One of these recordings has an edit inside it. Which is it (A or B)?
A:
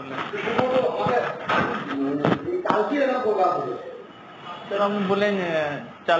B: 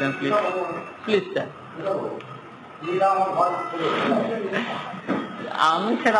A